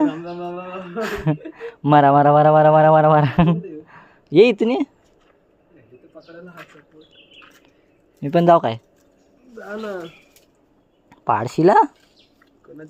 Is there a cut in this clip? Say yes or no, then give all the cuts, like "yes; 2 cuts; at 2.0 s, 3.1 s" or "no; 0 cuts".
no; 0 cuts